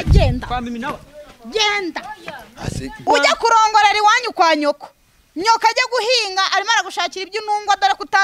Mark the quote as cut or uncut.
cut